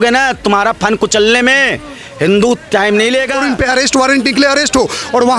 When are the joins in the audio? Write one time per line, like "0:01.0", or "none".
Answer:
0:03.5